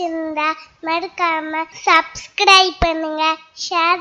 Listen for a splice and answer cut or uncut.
cut